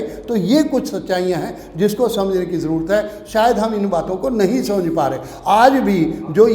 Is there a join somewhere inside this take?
no; 0 cuts

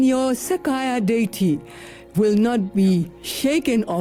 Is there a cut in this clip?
no; 0 cuts

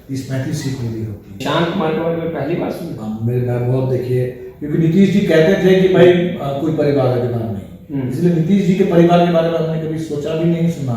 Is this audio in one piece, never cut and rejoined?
no; 1 cut; at 1.4 s

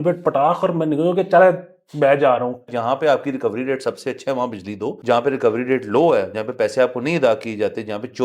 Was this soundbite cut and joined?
yes; 2 cuts; at 2.7 s, 4.9 s

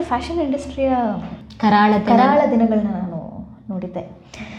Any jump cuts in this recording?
no; 0 cuts

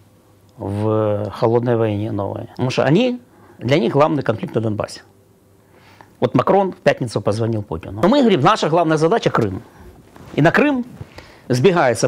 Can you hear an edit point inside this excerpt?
yes; 2 cuts; at 2.4 s, 8.0 s

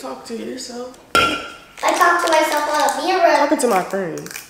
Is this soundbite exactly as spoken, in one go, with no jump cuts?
no; 1 cut; at 1.0 s

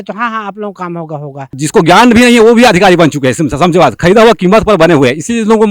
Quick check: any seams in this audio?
yes; 1 cut; at 1.6 s

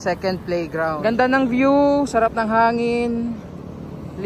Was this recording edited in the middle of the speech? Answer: yes; 1 cut; at 1.0 s

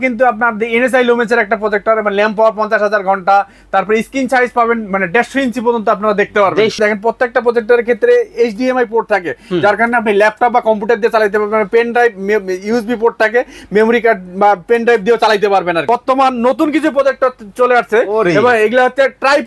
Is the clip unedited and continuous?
no; 2 cuts; at 6.8 s, 15.8 s

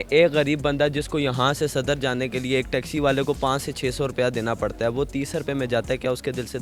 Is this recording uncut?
yes; 0 cuts

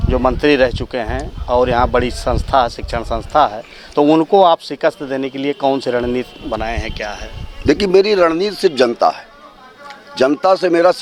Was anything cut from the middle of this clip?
no; 0 cuts

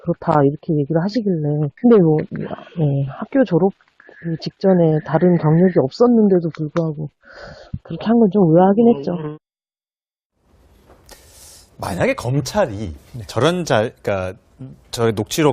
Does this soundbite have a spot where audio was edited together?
yes; 1 cut; at 2.3 s

